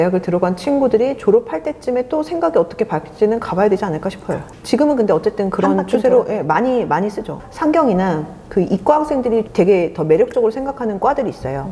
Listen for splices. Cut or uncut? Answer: cut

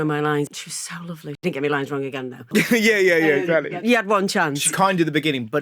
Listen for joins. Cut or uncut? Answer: cut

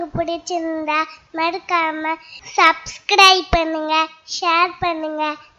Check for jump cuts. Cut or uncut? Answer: uncut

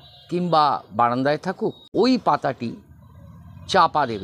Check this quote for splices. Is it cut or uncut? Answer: cut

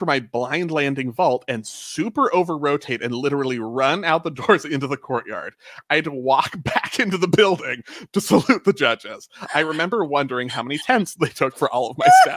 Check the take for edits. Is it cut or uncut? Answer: uncut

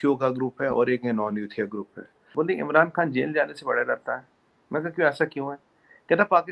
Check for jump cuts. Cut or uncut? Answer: cut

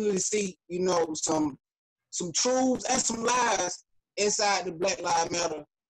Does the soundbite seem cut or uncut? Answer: uncut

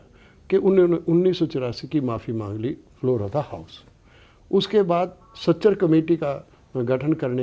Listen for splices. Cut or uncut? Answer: uncut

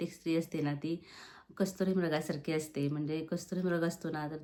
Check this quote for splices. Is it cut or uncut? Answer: uncut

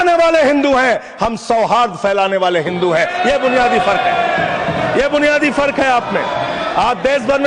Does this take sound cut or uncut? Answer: uncut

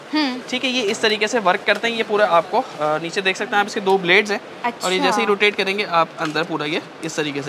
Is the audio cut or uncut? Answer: uncut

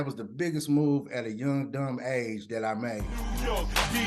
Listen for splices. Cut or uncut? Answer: cut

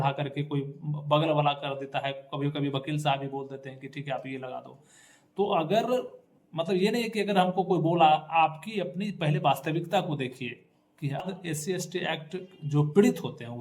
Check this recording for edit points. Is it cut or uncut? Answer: cut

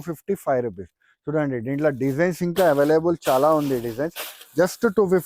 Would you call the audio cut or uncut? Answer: uncut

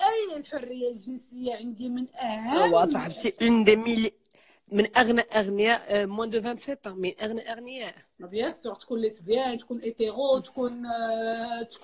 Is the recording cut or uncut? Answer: uncut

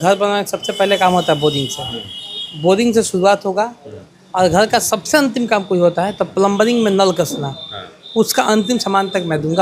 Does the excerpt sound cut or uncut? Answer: uncut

